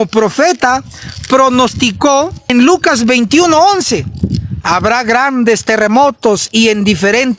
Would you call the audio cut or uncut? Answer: cut